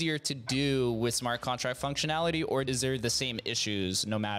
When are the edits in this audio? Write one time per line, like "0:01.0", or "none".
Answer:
0:02.7